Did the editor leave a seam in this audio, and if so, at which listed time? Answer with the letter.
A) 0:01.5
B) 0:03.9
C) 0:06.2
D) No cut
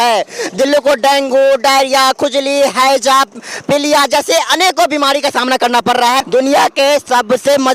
C